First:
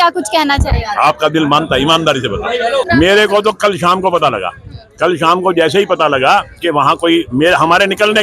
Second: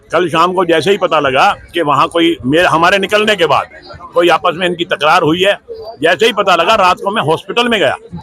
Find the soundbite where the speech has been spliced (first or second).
first